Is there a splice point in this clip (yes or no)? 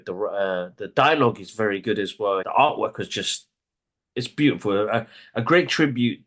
yes